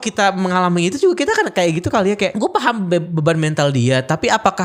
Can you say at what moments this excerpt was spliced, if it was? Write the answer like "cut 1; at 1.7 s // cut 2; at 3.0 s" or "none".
cut 1; at 2.3 s